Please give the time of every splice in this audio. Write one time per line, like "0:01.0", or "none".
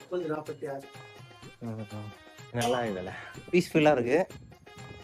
0:02.3